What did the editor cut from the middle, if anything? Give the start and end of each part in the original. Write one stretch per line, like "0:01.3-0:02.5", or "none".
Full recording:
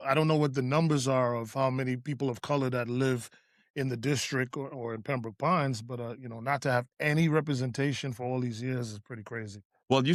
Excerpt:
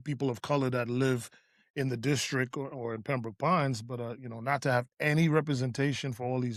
none